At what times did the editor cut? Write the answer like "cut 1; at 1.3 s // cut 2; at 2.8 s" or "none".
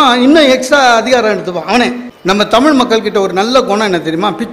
cut 1; at 2.1 s